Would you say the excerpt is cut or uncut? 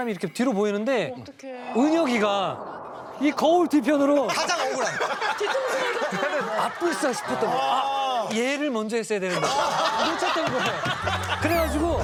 uncut